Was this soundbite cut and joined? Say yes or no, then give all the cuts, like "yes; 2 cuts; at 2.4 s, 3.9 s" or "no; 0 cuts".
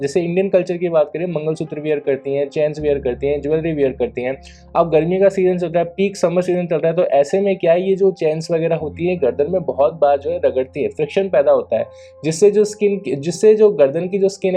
no; 0 cuts